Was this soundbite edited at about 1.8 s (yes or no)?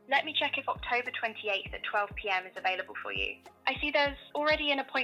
no